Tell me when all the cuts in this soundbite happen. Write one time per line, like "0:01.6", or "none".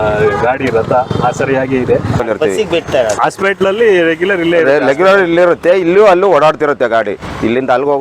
0:02.2